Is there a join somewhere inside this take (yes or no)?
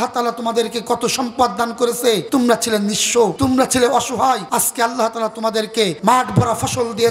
yes